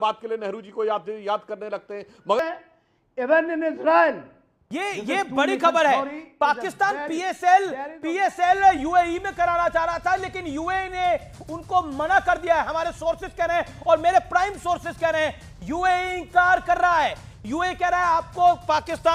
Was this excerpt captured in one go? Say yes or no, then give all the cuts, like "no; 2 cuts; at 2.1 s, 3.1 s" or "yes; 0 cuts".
no; 1 cut; at 2.4 s